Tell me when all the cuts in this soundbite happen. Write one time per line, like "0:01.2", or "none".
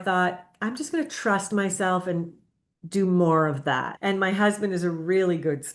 0:03.9

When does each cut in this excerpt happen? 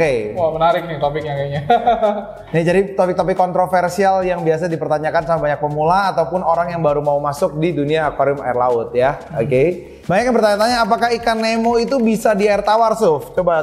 0:09.9

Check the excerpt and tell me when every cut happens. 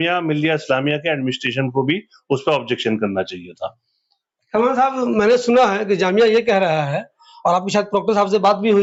none

